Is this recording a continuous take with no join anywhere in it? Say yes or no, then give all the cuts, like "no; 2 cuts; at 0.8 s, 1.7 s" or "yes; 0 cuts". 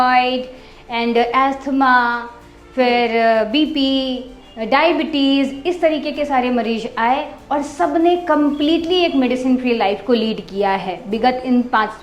yes; 0 cuts